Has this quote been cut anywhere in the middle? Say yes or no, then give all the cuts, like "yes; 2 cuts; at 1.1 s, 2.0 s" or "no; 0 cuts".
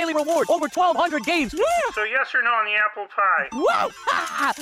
no; 0 cuts